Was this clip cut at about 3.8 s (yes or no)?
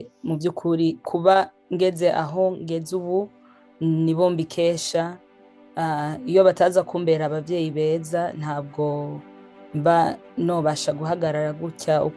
no